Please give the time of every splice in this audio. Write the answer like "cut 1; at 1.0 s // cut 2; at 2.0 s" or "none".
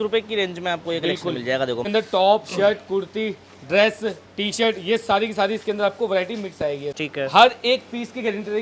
cut 1; at 1.9 s // cut 2; at 7.0 s